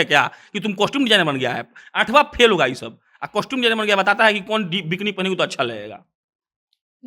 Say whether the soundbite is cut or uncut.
uncut